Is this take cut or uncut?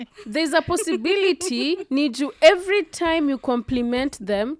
uncut